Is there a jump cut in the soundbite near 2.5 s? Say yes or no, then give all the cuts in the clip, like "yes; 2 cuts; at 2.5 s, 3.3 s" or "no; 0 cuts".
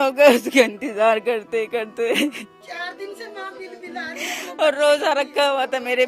yes; 1 cut; at 2.5 s